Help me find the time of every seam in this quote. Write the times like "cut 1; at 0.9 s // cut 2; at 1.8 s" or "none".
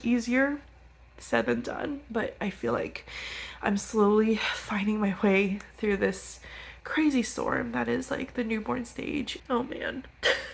cut 1; at 2.0 s // cut 2; at 9.3 s

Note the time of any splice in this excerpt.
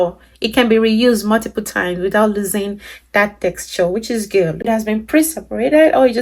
cut 1; at 4.7 s

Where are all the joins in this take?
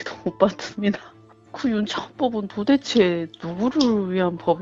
none

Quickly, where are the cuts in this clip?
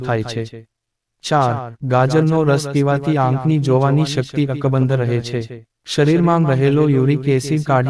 cut 1; at 1.2 s

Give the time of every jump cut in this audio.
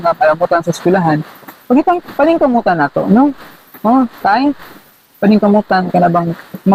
none

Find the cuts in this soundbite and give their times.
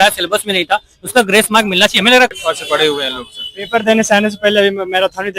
cut 1; at 2.3 s

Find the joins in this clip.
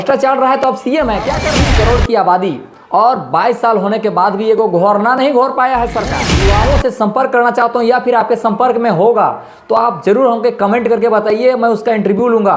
cut 1; at 1.5 s // cut 2; at 6.4 s

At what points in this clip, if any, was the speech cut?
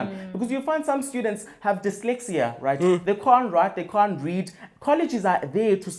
none

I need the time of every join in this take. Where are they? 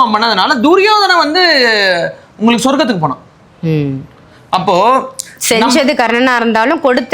none

